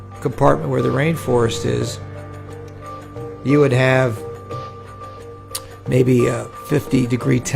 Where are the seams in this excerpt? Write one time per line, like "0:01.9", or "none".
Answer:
0:04.1
0:05.6